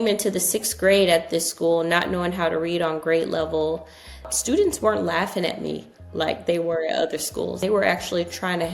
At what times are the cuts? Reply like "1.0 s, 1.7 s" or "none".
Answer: 4.3 s, 7.6 s